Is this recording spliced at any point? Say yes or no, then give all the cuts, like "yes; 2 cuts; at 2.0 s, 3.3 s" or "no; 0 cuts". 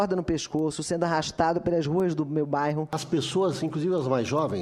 yes; 1 cut; at 3.0 s